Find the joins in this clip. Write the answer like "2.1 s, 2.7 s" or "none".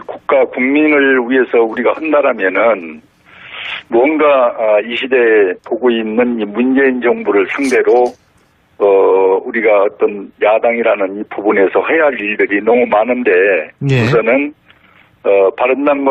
6.4 s